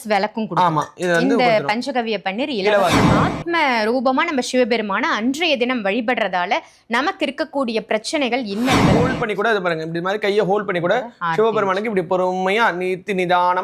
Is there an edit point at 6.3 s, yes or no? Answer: no